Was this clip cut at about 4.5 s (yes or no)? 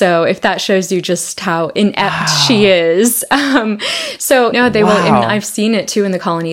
yes